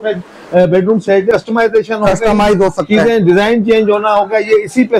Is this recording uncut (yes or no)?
no